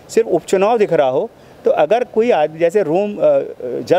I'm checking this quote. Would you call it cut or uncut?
uncut